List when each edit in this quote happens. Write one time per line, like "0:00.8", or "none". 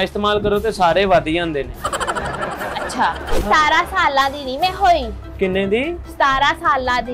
0:03.5